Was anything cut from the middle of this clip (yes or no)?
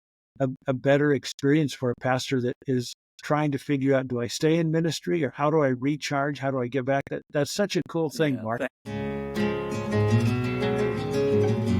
yes